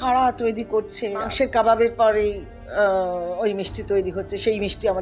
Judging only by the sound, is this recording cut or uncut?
cut